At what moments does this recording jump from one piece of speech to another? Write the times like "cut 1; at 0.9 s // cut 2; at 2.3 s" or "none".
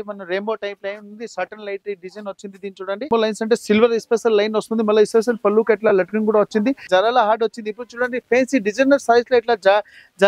cut 1; at 3.1 s // cut 2; at 6.9 s